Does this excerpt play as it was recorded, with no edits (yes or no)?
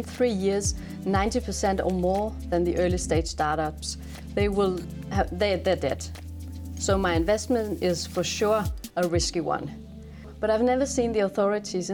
no